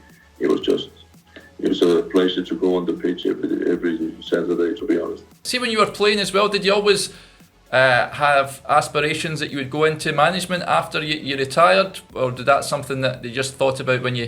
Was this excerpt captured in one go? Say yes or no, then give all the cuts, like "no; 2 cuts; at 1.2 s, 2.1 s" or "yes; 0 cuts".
no; 1 cut; at 5.5 s